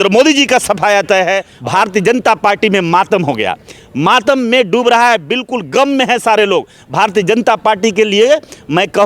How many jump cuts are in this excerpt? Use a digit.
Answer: 1